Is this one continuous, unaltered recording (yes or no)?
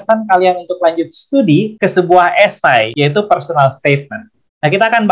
no